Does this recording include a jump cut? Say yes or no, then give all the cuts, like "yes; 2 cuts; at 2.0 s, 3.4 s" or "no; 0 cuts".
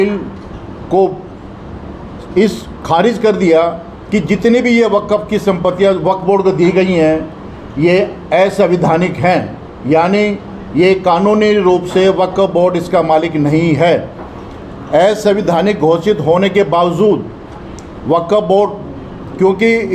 no; 0 cuts